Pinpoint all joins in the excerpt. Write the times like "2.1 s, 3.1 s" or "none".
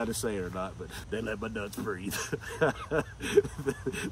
1.0 s